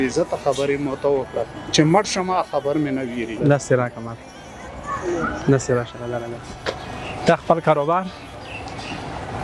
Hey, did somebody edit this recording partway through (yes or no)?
yes